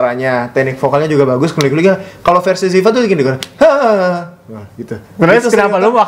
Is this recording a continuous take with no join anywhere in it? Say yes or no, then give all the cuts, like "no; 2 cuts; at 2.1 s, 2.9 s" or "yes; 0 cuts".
yes; 0 cuts